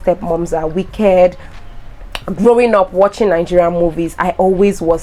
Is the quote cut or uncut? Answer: uncut